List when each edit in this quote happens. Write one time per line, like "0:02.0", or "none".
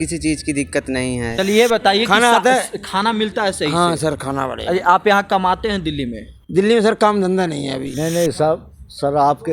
0:01.3
0:07.8